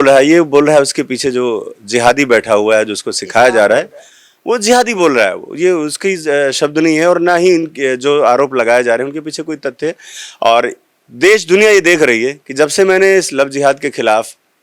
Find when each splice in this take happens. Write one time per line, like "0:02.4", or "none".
none